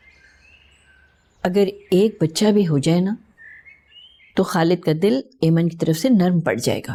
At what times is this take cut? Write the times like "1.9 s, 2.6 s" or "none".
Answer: none